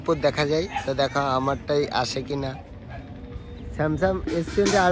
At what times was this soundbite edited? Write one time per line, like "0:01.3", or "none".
none